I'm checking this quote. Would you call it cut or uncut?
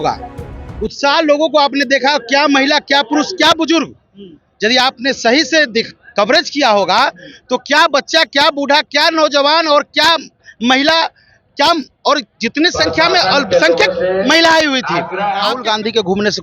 cut